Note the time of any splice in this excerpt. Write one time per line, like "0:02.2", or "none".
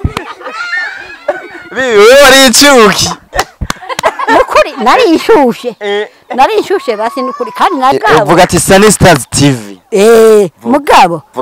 0:07.9